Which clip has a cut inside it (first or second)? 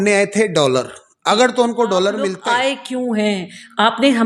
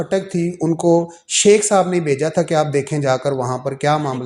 first